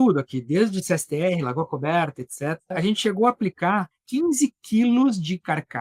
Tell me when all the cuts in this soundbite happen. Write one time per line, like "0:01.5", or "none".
0:02.7
0:04.0